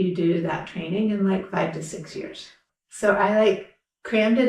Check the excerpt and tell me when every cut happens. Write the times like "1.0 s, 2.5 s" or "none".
2.6 s